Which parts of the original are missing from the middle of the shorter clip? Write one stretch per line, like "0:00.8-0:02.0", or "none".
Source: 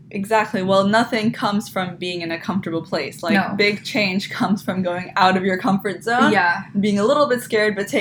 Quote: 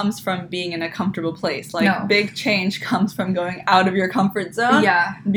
none